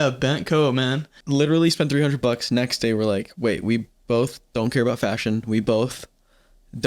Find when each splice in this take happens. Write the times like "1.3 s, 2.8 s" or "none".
1.1 s